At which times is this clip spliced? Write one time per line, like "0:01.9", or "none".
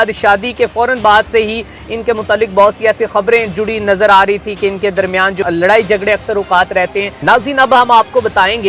0:05.4
0:07.1